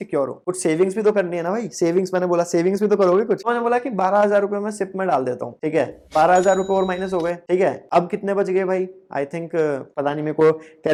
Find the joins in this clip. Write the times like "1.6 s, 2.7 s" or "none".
none